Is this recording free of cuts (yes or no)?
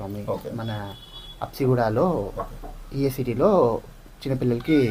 yes